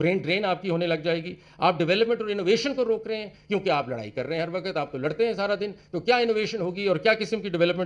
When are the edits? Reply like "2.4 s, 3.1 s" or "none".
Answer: none

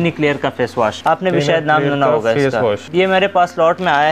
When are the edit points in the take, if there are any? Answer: 1.0 s, 2.8 s

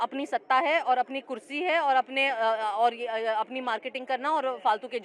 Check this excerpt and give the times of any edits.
none

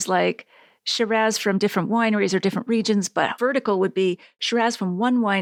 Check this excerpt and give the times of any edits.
none

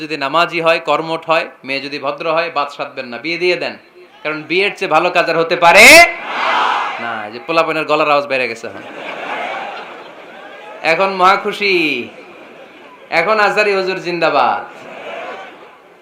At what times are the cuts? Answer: none

